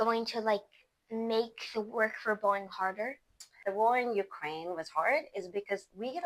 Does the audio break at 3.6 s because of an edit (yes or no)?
yes